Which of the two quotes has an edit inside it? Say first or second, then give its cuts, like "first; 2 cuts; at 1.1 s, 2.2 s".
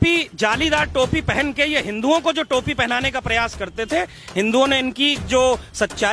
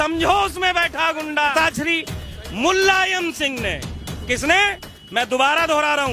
second; 1 cut; at 1.5 s